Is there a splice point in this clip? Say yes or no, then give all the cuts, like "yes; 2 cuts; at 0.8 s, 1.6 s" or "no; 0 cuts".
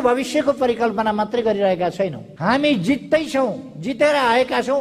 yes; 1 cut; at 2.3 s